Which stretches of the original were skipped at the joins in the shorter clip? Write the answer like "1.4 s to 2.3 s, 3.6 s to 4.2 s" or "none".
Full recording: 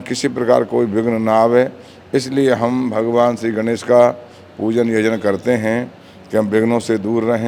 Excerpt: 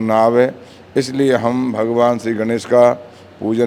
none